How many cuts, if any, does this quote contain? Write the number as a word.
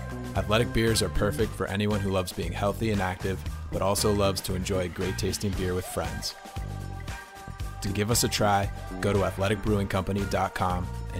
zero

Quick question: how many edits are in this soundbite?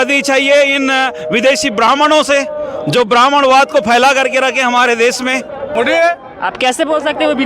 one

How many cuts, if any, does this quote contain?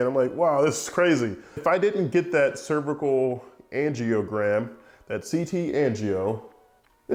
one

